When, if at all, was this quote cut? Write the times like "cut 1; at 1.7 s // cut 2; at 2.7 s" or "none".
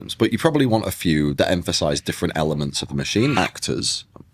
cut 1; at 1.3 s // cut 2; at 3.3 s